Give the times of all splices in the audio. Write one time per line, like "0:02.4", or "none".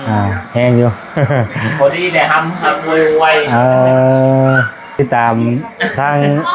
0:05.0